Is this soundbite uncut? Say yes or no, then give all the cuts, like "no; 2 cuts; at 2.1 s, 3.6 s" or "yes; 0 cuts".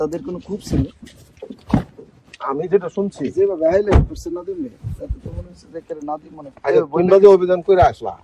yes; 0 cuts